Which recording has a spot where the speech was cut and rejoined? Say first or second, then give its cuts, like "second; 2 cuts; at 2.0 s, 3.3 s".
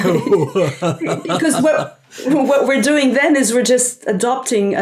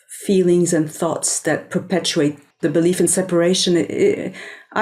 second; 1 cut; at 2.5 s